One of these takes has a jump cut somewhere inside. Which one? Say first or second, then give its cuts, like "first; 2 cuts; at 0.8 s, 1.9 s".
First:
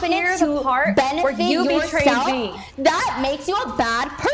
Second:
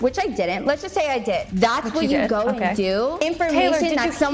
second; 2 cuts; at 1.5 s, 3.2 s